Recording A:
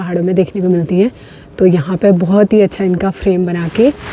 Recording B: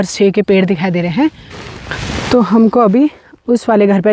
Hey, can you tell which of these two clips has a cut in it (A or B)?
B